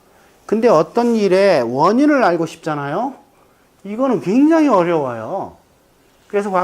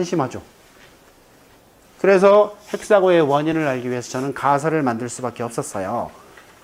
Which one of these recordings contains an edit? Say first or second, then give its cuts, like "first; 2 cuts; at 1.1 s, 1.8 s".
first; 1 cut; at 4.0 s